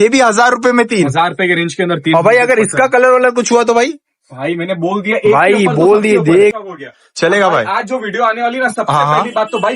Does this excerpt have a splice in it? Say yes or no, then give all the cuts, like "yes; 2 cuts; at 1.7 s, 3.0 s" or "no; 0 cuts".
yes; 1 cut; at 6.5 s